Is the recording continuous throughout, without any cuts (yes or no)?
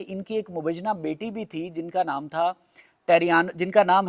yes